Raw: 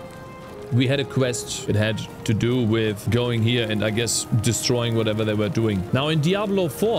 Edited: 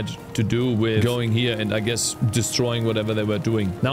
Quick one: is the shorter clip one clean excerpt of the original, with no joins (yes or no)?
no